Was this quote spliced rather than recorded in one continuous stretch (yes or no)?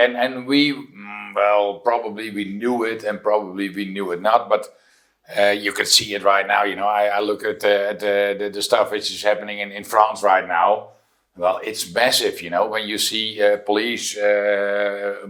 no